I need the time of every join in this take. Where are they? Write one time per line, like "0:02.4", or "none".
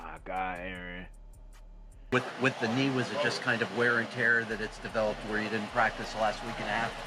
0:02.1